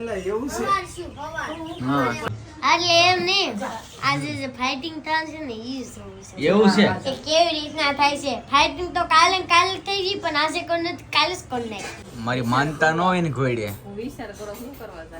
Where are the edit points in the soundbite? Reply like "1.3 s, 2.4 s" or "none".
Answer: 2.2 s, 11.9 s